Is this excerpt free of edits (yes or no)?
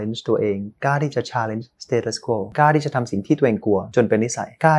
no